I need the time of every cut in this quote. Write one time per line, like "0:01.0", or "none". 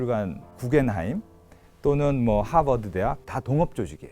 0:03.2